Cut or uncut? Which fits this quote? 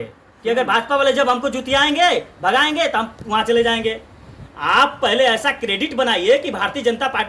uncut